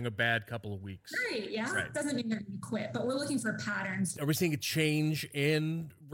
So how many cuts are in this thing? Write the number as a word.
one